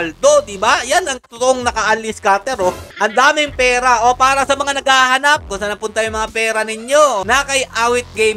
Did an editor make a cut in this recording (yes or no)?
yes